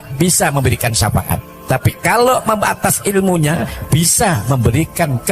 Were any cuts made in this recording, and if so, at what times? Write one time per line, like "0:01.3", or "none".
0:01.5